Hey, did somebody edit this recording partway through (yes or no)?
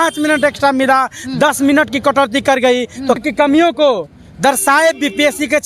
yes